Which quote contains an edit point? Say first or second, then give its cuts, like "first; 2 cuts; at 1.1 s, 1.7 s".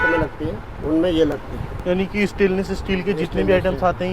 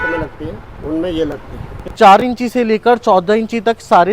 second; 1 cut; at 1.9 s